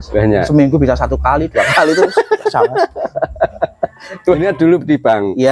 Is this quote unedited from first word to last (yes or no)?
no